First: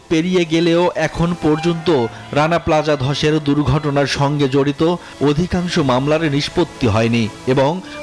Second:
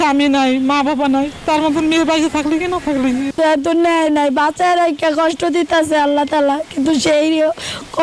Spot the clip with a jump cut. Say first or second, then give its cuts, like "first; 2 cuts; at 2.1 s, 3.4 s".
second; 1 cut; at 3.3 s